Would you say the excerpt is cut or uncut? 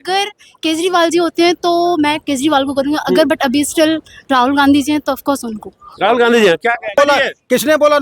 cut